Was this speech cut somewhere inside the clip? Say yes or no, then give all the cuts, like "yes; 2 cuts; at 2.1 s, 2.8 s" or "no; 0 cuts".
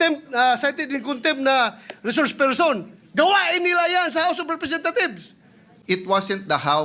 yes; 1 cut; at 5.7 s